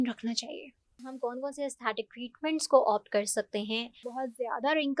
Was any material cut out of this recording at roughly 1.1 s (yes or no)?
yes